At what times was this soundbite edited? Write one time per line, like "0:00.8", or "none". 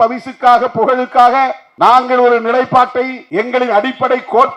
0:01.6
0:03.2